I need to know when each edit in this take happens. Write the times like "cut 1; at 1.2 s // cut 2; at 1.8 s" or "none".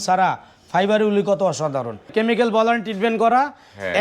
cut 1; at 2.1 s